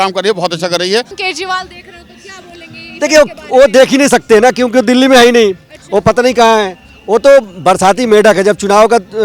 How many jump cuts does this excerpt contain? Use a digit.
1